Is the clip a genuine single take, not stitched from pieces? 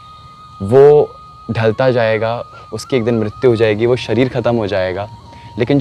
yes; 0 cuts

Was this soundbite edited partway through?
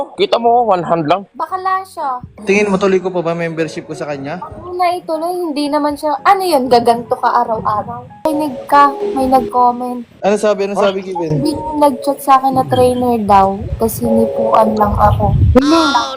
yes; 2 cuts; at 2.3 s, 8.2 s

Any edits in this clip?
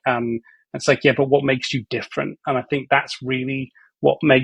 no; 0 cuts

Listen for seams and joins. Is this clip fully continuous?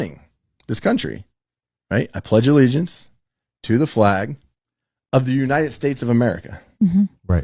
yes; 0 cuts

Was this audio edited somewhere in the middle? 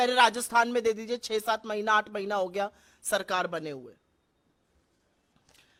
no; 0 cuts

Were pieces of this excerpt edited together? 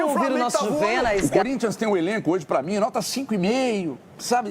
yes; 1 cut; at 1.2 s

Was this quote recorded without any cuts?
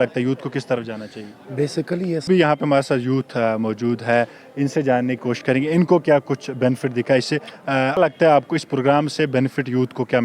no; 2 cuts; at 2.2 s, 8.0 s

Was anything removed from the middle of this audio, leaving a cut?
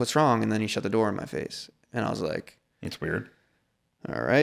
no; 0 cuts

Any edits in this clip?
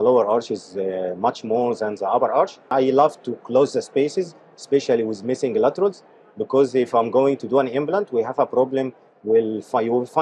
yes; 1 cut; at 2.7 s

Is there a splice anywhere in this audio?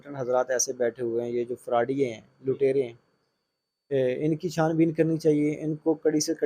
no; 0 cuts

